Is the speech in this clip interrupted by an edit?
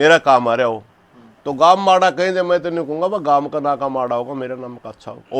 no; 0 cuts

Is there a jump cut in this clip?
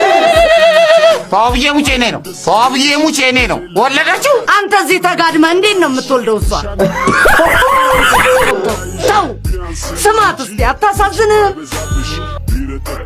no; 0 cuts

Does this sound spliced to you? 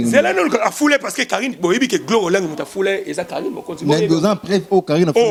no; 0 cuts

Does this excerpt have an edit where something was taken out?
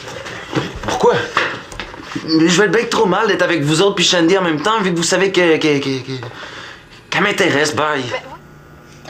yes; 1 cut; at 8.1 s

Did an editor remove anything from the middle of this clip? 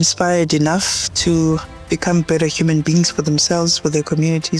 no; 0 cuts

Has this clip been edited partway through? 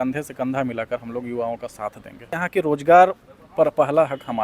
yes; 1 cut; at 2.3 s

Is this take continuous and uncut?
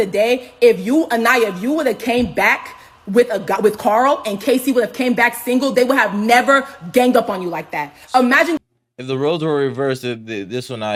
yes; 0 cuts

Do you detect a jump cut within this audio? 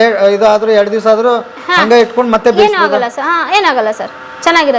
no; 0 cuts

